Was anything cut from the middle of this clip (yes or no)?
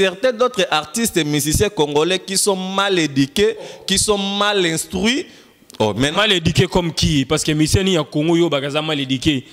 no